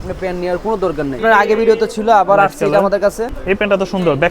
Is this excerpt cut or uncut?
cut